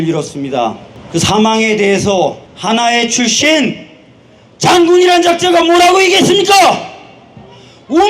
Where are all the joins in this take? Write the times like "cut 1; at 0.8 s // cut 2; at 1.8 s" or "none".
cut 1; at 0.9 s // cut 2; at 2.5 s